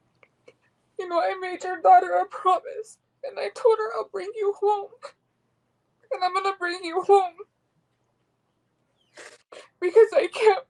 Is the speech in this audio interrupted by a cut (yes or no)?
no